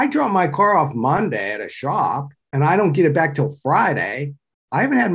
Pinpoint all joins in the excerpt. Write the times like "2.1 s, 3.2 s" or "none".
2.4 s